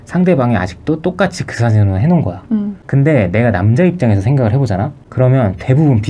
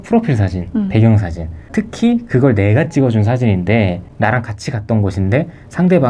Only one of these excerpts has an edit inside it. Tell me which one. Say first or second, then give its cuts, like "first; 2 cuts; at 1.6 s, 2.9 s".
first; 1 cut; at 2.8 s